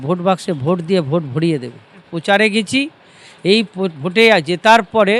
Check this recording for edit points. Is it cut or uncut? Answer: cut